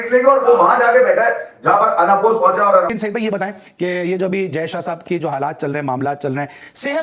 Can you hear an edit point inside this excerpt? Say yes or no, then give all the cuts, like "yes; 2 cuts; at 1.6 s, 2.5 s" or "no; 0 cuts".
yes; 1 cut; at 3.0 s